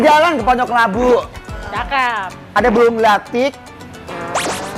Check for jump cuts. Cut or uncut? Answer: uncut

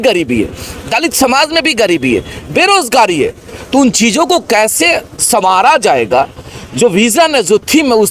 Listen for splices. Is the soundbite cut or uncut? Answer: uncut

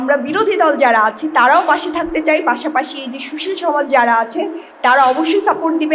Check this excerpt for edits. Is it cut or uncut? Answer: uncut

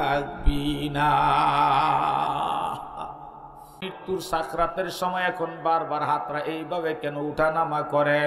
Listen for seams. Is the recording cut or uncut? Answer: cut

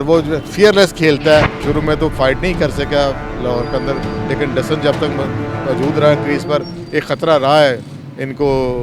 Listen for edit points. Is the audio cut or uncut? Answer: cut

